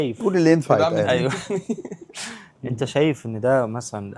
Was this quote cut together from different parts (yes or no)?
no